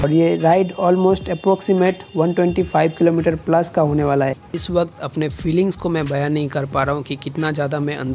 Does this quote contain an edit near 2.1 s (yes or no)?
no